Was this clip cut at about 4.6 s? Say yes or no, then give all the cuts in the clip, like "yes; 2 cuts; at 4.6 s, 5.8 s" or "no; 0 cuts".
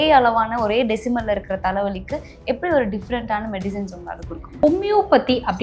yes; 1 cut; at 4.6 s